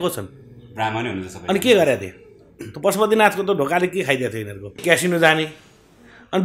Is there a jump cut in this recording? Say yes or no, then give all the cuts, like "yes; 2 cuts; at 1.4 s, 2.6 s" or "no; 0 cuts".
yes; 1 cut; at 4.8 s